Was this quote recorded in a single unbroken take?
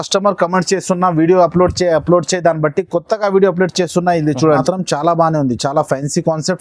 no; 1 cut; at 4.6 s

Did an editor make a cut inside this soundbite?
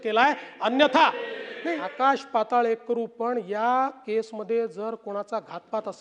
yes; 1 cut; at 1.9 s

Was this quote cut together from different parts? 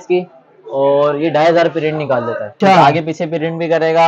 yes; 1 cut; at 2.5 s

